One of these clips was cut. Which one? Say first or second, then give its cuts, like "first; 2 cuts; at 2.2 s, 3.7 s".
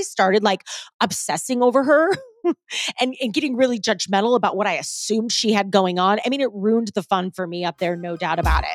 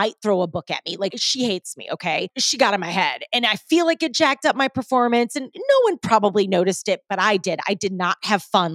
second; 2 cuts; at 1.2 s, 2.4 s